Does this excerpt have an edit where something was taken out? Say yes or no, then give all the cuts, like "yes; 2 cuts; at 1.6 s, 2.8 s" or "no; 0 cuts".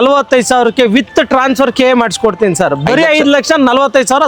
no; 0 cuts